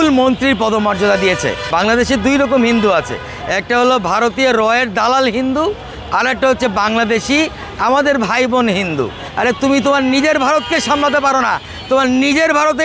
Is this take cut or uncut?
cut